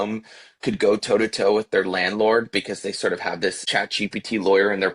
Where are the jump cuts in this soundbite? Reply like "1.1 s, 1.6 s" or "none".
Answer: 3.6 s